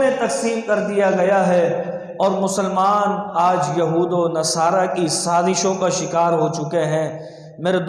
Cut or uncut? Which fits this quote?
uncut